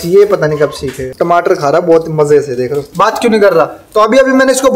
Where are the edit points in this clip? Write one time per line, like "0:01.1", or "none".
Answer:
0:01.0
0:02.8